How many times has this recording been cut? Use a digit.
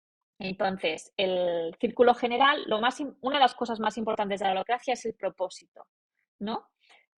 0